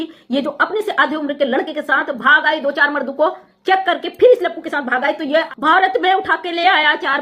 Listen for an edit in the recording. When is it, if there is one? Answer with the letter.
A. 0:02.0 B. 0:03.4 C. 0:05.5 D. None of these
C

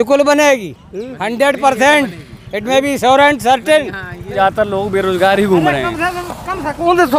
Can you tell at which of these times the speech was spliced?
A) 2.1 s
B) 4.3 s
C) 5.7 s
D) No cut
B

